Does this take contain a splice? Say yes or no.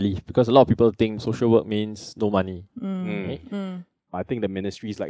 yes